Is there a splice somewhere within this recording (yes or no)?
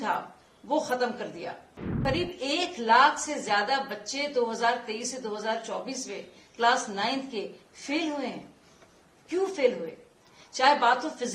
yes